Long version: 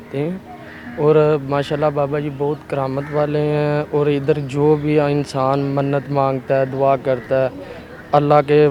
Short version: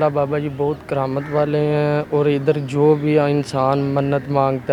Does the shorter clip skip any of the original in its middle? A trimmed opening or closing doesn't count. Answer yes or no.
no